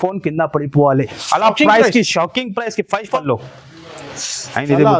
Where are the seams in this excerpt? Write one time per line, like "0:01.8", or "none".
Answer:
0:03.2